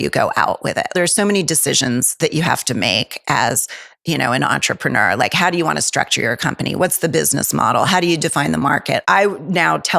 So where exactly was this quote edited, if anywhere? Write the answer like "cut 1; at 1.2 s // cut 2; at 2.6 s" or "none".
cut 1; at 0.9 s // cut 2; at 9.0 s